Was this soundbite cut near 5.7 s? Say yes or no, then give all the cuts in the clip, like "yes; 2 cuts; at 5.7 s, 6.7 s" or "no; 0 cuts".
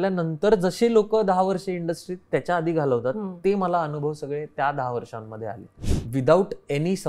yes; 1 cut; at 5.7 s